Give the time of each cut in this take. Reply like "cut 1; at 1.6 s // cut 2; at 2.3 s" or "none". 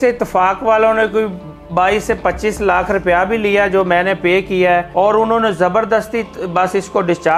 cut 1; at 4.9 s